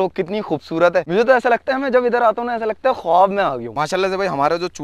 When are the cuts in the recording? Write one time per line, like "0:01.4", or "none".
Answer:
0:03.7